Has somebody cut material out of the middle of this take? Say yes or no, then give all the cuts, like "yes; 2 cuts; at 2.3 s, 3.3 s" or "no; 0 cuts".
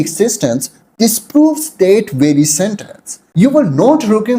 yes; 1 cut; at 3.2 s